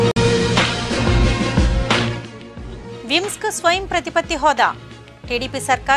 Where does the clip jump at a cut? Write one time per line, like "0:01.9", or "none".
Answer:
0:01.9